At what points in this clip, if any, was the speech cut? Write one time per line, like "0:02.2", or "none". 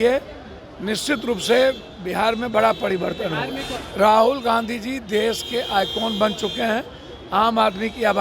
0:03.8